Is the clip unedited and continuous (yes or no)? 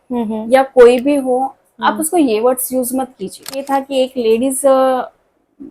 no